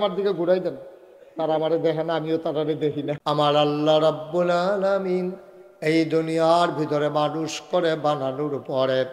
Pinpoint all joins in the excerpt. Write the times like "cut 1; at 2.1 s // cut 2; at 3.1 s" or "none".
cut 1; at 3.1 s